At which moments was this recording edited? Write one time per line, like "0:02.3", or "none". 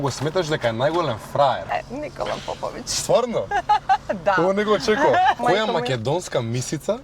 0:01.7
0:05.4

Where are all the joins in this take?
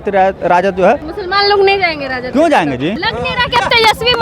0:01.1
0:03.0

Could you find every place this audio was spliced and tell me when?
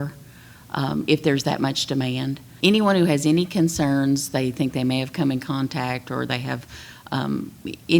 0:02.4

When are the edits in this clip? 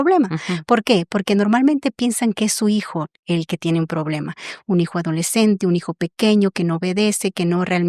none

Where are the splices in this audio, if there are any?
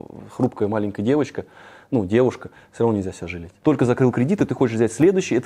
0:03.5

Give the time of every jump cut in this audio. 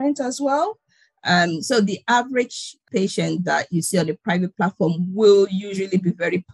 0:02.8

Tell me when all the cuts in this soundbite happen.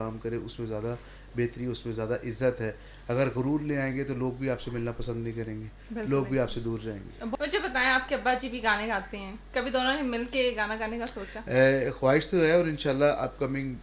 0:07.3

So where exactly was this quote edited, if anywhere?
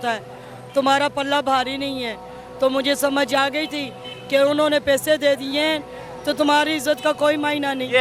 none

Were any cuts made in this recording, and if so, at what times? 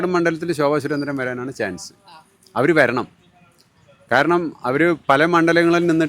none

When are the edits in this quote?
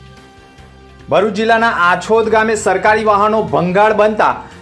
0:01.0

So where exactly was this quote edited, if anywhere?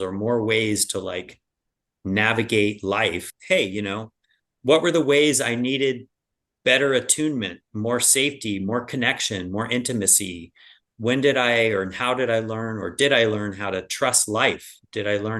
0:03.3

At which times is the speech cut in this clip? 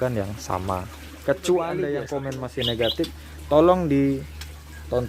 0:02.1

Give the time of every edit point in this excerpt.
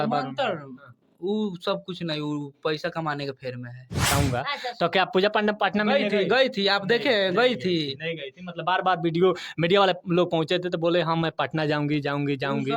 0:04.1

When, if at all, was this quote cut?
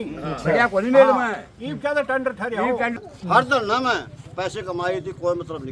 0:03.0

